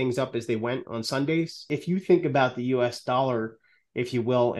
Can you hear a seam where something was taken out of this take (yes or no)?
yes